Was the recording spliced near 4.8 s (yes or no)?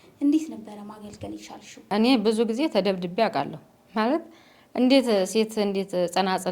no